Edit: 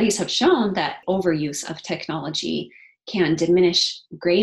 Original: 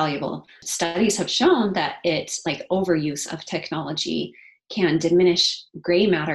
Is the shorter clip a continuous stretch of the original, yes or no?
no